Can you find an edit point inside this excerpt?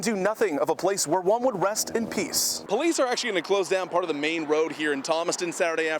yes; 1 cut; at 2.5 s

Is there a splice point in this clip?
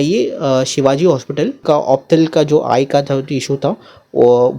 yes; 1 cut; at 1.6 s

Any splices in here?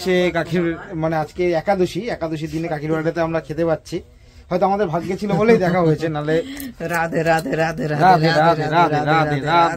no; 0 cuts

